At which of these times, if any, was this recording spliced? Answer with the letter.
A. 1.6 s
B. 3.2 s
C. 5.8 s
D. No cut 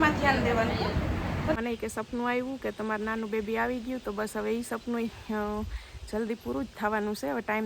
A